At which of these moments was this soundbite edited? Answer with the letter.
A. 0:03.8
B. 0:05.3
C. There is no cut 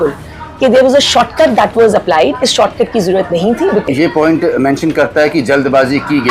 A